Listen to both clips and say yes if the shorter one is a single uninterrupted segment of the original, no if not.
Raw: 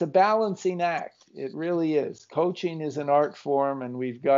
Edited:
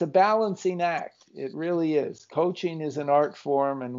yes